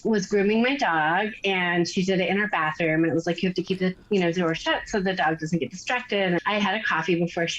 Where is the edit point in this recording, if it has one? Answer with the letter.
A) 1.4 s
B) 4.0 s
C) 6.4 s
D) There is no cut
C